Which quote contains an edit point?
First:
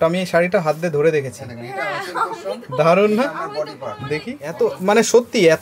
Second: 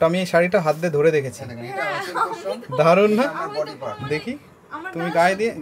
first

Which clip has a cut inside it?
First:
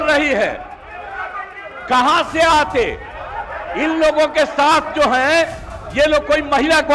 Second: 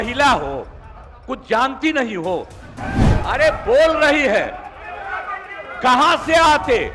second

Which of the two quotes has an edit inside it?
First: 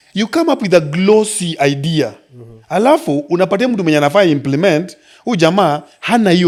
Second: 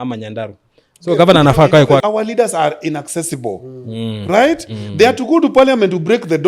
second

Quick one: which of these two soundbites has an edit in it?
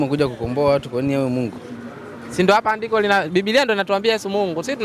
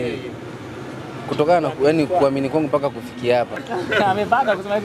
second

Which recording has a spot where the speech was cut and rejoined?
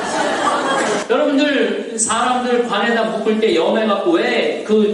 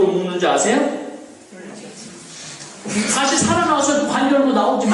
first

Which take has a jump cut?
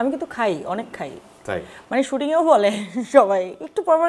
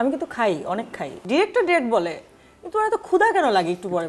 second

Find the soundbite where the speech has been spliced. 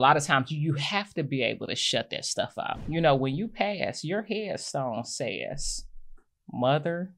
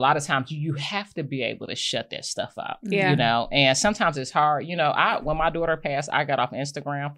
first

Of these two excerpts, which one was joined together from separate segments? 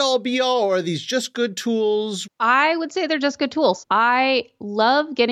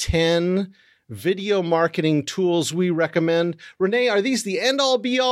first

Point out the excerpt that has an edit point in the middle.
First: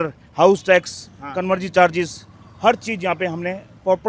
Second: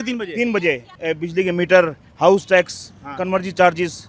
second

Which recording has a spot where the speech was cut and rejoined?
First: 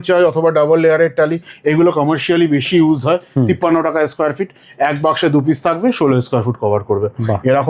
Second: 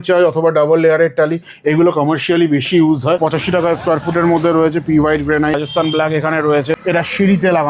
second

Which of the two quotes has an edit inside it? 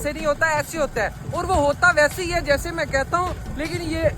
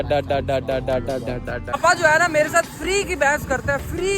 second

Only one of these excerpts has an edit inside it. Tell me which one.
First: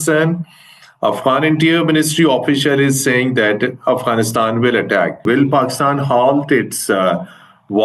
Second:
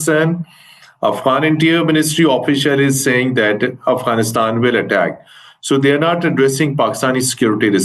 first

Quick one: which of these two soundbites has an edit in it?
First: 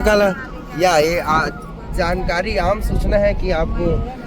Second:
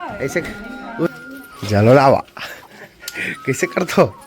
second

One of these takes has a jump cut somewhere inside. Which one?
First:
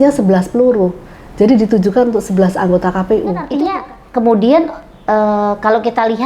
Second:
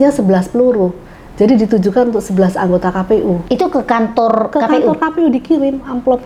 first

